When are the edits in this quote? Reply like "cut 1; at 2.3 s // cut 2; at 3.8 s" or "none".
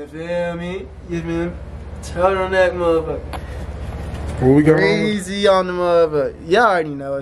none